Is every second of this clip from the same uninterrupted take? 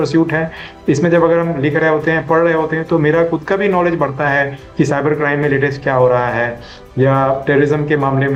yes; 0 cuts

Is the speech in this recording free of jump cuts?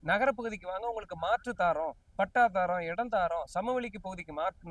yes; 0 cuts

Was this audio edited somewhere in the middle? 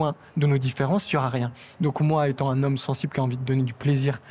no; 0 cuts

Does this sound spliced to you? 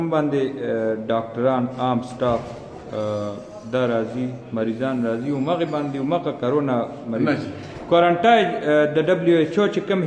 no; 0 cuts

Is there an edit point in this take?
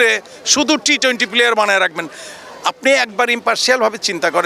no; 0 cuts

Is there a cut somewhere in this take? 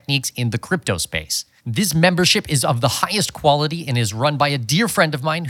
no; 0 cuts

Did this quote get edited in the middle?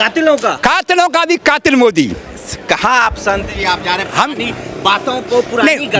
no; 0 cuts

